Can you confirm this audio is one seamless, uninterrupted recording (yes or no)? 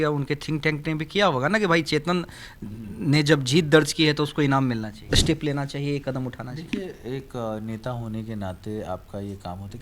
no